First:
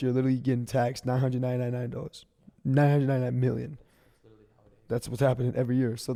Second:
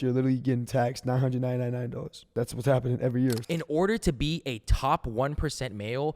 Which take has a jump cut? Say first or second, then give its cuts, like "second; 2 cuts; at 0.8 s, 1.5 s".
second; 2 cuts; at 2.1 s, 3.4 s